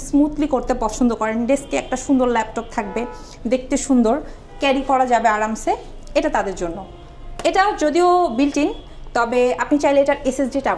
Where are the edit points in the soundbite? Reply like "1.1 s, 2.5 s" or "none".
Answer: none

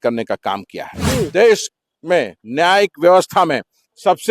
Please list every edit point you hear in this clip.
1.3 s

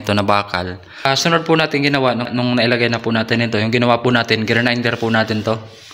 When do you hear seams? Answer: 1.1 s, 2.3 s

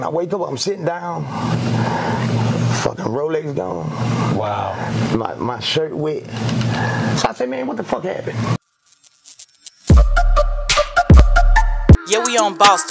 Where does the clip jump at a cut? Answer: 8.6 s

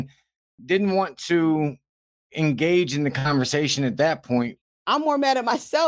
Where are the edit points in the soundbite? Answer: 4.6 s

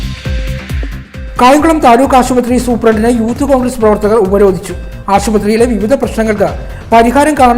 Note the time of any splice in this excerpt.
0.9 s

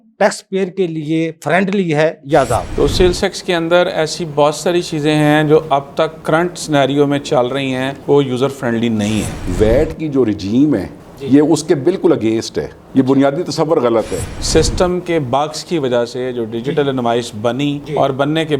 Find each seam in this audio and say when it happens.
2.7 s, 9.3 s, 14.4 s

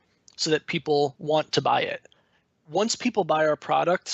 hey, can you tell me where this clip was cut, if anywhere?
1.2 s

